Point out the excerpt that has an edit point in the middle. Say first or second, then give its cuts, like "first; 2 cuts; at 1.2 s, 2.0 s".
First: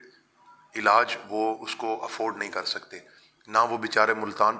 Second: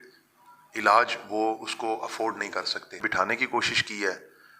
second; 1 cut; at 3.1 s